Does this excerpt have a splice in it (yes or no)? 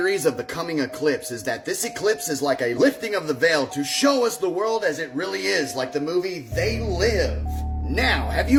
no